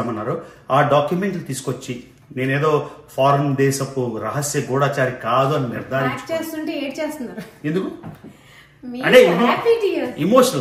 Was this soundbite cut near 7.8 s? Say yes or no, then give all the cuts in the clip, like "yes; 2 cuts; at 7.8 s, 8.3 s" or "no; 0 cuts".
no; 1 cut; at 6.2 s